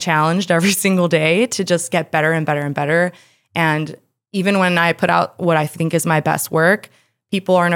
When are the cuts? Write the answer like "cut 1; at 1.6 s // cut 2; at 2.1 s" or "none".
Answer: none